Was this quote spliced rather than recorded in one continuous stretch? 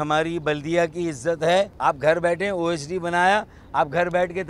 yes; 1 cut; at 1.7 s

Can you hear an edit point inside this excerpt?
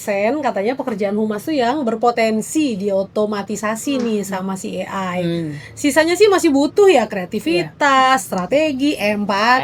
no; 0 cuts

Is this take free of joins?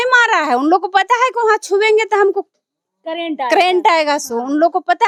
yes; 0 cuts

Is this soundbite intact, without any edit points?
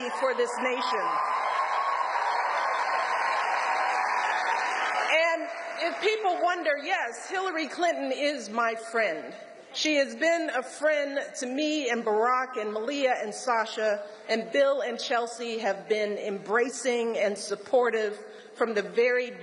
no; 1 cut; at 2.1 s

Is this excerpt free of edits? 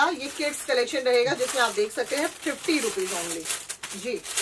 yes; 0 cuts

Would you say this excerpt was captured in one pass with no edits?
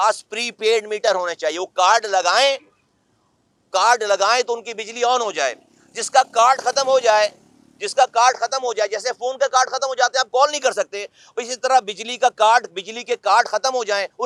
yes; 0 cuts

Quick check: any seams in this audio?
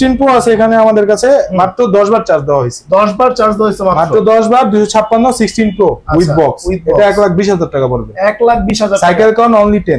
no; 0 cuts

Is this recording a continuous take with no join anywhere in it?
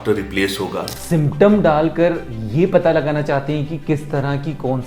no; 1 cut; at 0.9 s

